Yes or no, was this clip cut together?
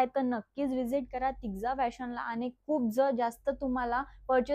no